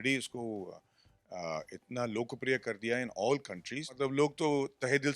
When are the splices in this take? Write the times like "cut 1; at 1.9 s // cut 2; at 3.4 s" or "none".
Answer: cut 1; at 4.0 s